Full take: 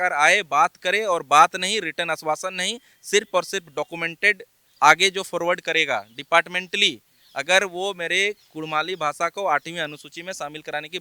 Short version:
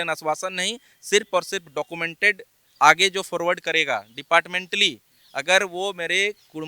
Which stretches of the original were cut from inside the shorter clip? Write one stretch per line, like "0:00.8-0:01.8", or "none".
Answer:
none